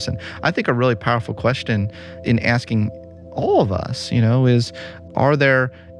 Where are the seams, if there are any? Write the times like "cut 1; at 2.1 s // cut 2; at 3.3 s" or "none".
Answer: cut 1; at 2.2 s // cut 2; at 5.0 s